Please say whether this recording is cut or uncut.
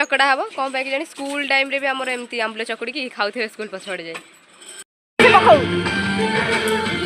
cut